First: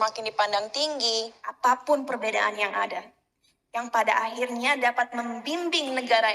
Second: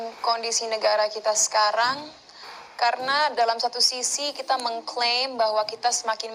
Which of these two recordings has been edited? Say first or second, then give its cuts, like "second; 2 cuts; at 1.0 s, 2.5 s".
first; 1 cut; at 1.4 s